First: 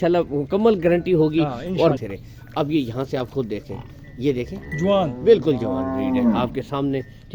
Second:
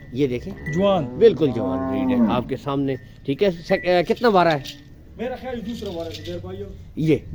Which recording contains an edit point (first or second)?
first